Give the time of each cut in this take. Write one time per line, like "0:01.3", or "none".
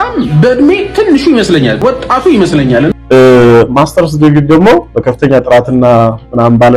0:01.8
0:02.9

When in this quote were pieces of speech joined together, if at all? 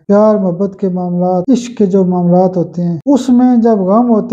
0:01.4
0:03.0

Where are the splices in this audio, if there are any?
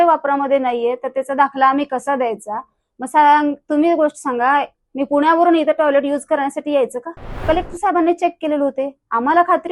0:07.4

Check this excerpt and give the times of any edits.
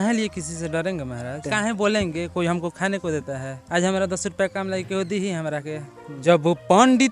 0:01.5
0:03.5
0:06.2

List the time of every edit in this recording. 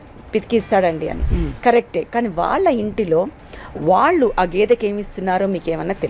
none

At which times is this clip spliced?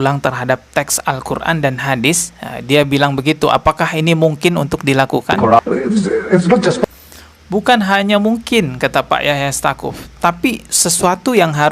0:05.6

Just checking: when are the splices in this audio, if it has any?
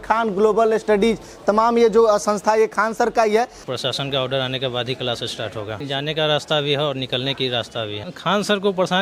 0:03.6
0:05.7
0:08.0

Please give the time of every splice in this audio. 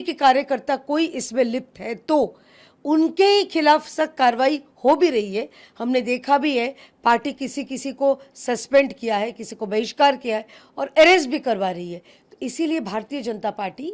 none

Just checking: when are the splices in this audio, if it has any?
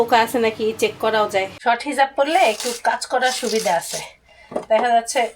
0:01.5

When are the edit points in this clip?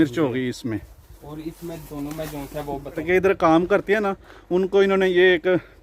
0:03.0

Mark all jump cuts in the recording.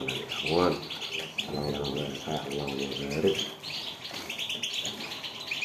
0:02.2

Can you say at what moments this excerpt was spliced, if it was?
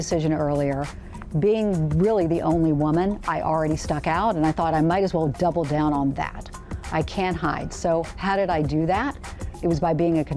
none

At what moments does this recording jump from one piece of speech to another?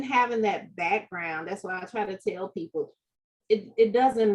none

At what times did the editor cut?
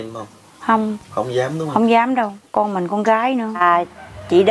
0:03.6

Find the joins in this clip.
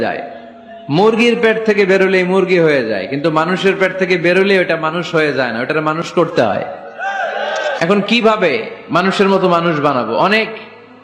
0:07.8

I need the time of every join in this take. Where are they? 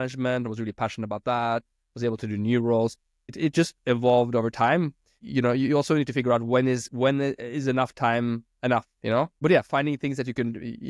0:03.3
0:05.2
0:09.3

